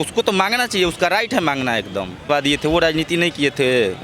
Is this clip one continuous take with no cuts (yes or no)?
no